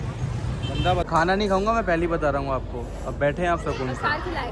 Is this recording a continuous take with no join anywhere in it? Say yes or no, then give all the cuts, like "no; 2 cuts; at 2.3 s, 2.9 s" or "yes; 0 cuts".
no; 1 cut; at 1.1 s